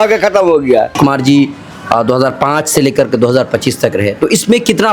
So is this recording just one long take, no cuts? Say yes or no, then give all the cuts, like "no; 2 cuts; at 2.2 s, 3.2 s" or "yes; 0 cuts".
no; 1 cut; at 0.9 s